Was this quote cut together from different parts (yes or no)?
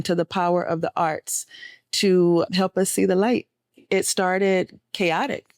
yes